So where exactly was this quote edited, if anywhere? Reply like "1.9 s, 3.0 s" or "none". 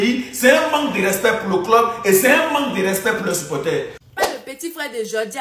4.0 s

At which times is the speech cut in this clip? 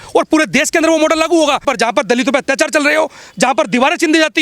1.6 s

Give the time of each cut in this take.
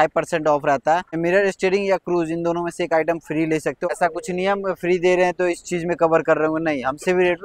1.2 s, 3.9 s

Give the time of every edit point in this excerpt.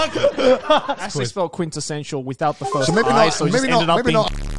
1.0 s

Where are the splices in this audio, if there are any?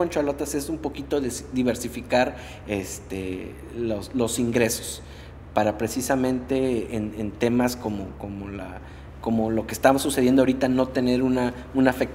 none

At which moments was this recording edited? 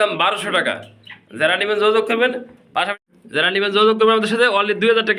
2.9 s

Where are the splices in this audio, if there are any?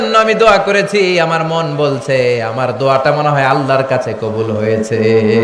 none

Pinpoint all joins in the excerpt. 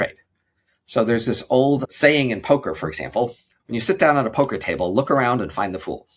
1.9 s, 3.5 s

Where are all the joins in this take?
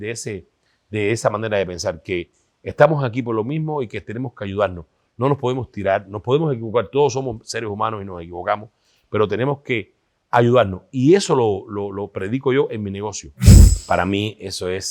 13.7 s

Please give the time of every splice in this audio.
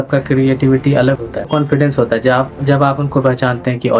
1.5 s

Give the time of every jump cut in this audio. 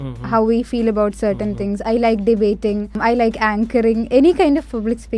3.0 s

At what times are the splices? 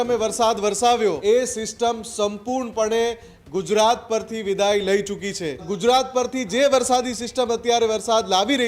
1.2 s, 5.7 s

